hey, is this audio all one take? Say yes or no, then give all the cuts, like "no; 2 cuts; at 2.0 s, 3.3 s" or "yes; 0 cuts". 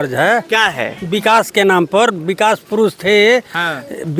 yes; 0 cuts